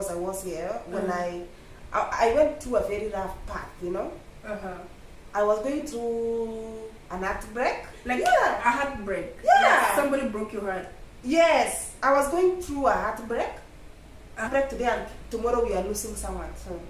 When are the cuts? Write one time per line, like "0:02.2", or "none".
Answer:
0:07.9
0:14.5